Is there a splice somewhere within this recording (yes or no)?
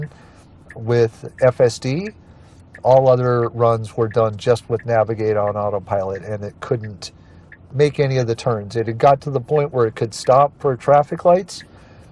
no